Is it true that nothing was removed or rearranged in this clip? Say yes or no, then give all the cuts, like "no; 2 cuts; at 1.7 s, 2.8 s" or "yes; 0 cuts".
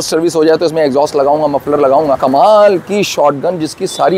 no; 1 cut; at 2.2 s